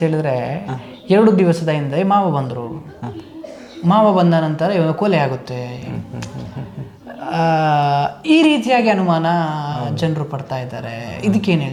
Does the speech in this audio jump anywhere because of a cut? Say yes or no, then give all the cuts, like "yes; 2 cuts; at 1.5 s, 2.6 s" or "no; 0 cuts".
no; 0 cuts